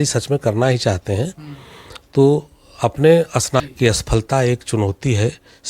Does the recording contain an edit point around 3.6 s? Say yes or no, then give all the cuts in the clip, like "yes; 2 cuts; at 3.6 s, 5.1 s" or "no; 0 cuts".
yes; 1 cut; at 3.6 s